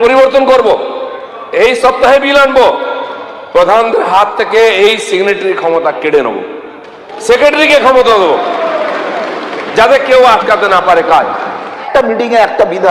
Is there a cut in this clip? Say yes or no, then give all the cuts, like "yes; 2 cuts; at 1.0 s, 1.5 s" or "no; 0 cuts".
yes; 1 cut; at 11.8 s